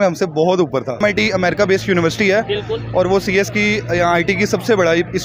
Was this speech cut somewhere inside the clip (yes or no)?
yes